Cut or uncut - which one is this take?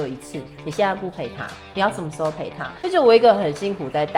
cut